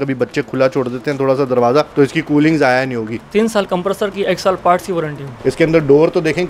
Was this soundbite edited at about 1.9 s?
yes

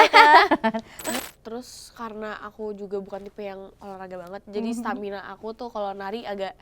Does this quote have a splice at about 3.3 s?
no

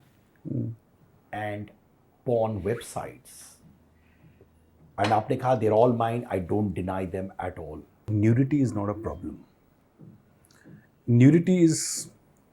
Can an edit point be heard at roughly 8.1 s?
yes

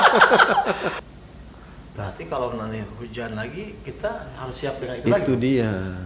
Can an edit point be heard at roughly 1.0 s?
yes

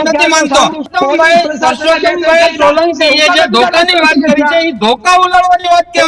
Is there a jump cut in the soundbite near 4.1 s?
no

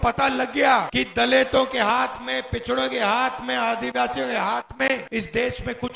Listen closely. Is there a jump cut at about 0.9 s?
yes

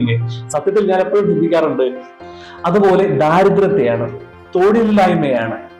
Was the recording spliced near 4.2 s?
no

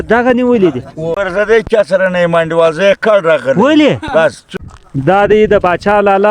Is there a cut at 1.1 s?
yes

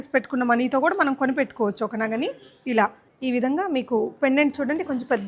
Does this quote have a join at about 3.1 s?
yes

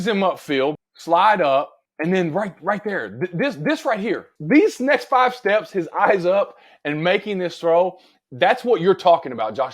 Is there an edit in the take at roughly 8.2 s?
no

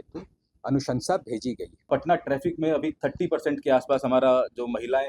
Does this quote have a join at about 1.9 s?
yes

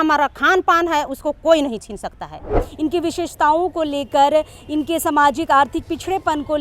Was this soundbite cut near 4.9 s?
no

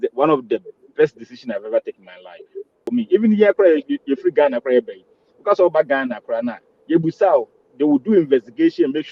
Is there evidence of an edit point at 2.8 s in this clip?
yes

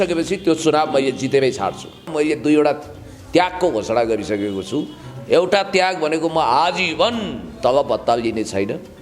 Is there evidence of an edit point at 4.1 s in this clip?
no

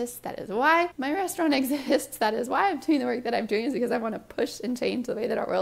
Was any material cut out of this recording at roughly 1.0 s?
yes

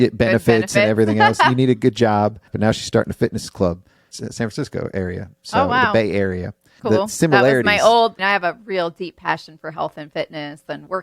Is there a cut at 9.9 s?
no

